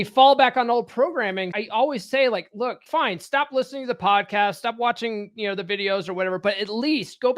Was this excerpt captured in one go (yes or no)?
no